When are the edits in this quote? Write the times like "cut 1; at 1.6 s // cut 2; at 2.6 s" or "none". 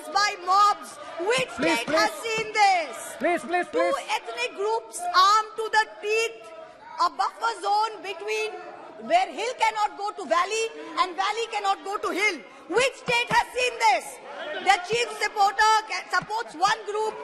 none

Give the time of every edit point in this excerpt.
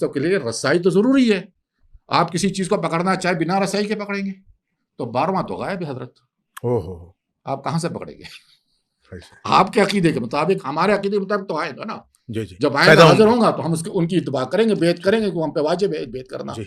none

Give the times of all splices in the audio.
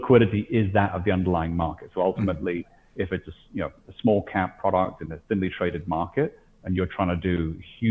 none

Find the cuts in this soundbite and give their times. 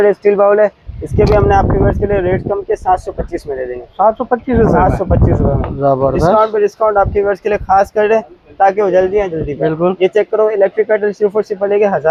none

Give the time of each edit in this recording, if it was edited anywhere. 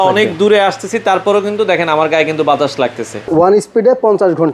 cut 1; at 3.3 s

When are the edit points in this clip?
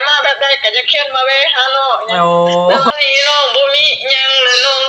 cut 1; at 2.9 s

